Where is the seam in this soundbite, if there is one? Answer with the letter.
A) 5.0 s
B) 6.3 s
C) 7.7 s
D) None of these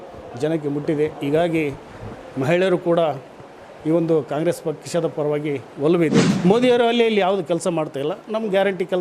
B